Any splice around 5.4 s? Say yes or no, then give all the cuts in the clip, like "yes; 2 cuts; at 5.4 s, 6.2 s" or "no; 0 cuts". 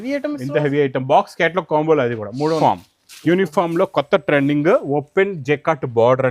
no; 1 cut; at 2.6 s